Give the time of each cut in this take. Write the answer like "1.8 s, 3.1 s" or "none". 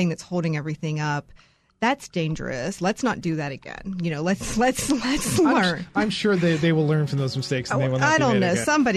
none